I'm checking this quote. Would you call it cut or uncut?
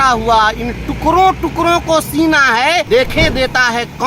cut